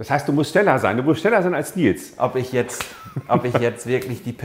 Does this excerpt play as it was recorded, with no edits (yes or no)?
yes